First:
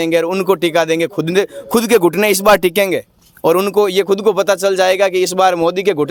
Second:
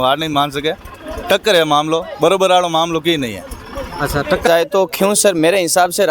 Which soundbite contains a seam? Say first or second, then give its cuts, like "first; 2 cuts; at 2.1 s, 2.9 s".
second; 1 cut; at 4.5 s